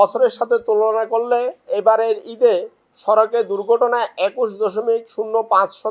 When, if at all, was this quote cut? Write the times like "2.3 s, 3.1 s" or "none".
1.6 s